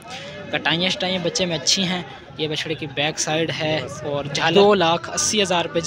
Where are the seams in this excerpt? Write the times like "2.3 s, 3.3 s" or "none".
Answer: 4.5 s